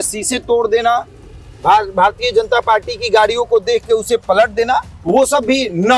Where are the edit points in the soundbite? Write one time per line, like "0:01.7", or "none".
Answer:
none